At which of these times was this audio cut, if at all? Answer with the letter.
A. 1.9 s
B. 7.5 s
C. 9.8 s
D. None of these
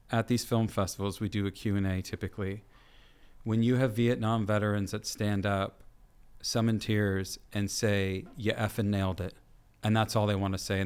D